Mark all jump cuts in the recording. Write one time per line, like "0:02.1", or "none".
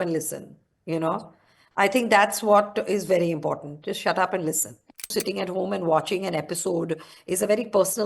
0:05.1

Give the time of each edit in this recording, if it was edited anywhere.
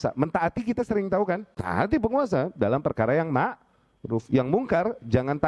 0:01.5
0:04.2

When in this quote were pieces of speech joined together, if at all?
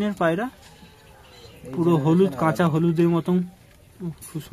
none

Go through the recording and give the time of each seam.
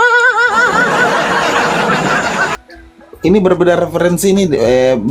0:02.6

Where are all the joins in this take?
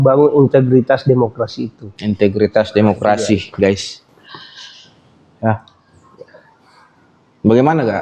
none

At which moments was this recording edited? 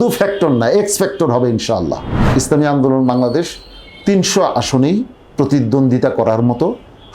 0:02.1

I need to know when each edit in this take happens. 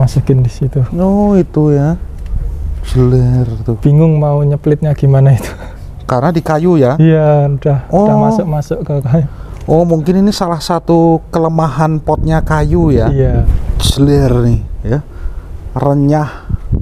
0:13.5

